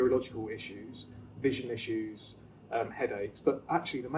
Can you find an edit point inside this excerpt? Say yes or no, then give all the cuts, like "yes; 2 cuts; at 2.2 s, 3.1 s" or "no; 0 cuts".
no; 0 cuts